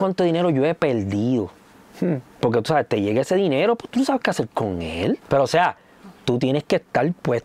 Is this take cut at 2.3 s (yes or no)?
no